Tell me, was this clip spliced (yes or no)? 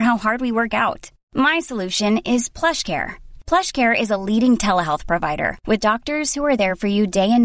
no